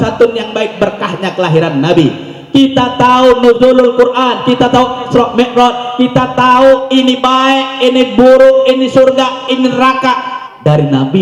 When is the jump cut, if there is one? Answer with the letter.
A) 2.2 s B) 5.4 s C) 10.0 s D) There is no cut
D